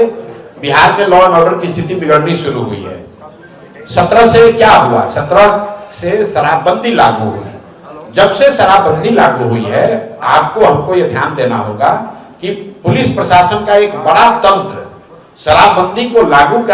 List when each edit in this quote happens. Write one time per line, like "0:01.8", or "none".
none